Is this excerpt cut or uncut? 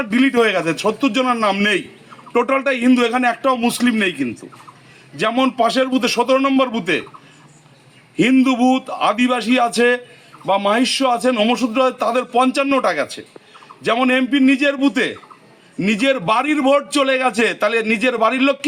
uncut